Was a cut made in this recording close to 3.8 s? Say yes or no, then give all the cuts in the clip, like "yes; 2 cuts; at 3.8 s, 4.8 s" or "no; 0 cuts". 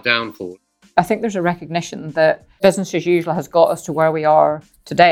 no; 2 cuts; at 0.9 s, 2.5 s